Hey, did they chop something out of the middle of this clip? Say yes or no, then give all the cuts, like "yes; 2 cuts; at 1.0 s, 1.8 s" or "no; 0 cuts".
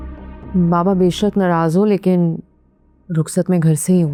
no; 0 cuts